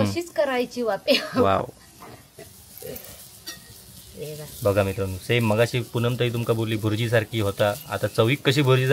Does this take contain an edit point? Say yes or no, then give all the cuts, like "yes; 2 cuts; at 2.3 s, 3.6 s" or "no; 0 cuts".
no; 0 cuts